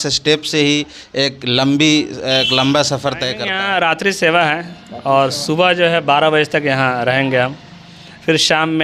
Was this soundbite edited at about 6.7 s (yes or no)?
no